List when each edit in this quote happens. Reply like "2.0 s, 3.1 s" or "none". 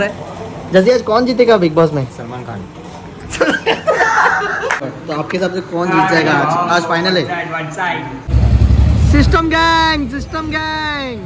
4.8 s, 8.2 s